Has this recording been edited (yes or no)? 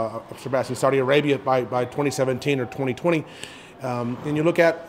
no